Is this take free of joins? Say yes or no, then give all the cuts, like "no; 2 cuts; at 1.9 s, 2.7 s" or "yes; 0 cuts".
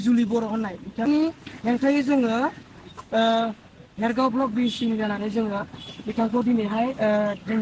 no; 1 cut; at 1.1 s